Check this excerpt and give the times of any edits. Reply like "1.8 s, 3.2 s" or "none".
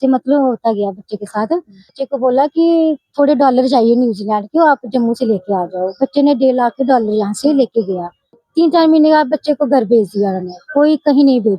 2.0 s, 8.4 s